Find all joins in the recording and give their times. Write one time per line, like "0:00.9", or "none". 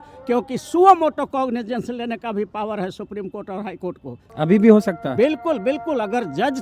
0:04.2